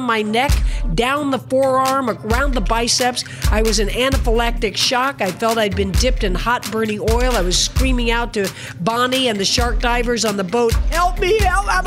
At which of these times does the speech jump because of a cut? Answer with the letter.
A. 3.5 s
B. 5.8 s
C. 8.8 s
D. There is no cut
D